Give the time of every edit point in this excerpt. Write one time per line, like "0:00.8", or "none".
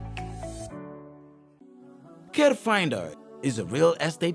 0:01.6